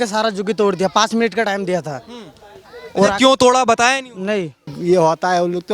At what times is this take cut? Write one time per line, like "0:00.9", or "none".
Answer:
0:04.8